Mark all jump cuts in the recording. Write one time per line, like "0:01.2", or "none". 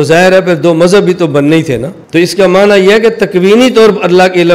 0:01.9